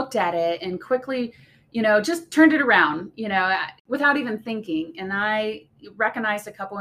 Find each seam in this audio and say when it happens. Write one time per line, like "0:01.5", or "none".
0:03.7